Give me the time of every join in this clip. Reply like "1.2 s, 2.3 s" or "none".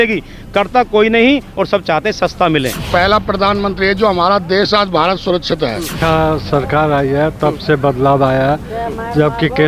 2.9 s, 6.0 s